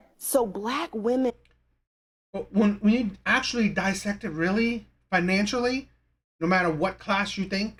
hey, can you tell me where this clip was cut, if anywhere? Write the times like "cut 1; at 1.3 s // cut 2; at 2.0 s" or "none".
none